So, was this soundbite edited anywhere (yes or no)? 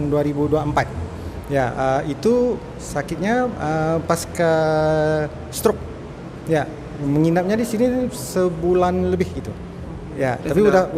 no